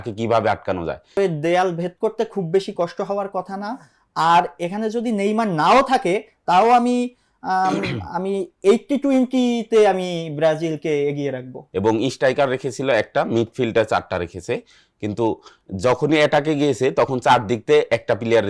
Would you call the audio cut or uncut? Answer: cut